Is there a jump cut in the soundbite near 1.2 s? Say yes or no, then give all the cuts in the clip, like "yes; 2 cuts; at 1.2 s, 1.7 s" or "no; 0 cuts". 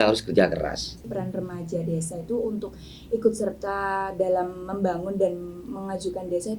yes; 1 cut; at 1.2 s